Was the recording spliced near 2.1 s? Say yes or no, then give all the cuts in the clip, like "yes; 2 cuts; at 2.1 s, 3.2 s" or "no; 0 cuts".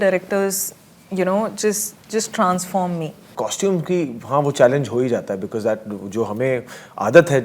no; 1 cut; at 3.3 s